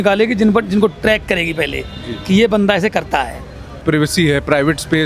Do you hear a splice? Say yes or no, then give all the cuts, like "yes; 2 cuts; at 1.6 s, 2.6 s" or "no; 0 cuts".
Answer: yes; 1 cut; at 3.8 s